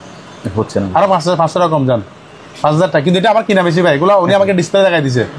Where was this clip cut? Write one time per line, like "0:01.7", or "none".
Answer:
none